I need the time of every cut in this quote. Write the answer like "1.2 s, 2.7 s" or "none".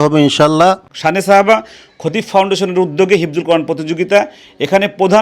0.9 s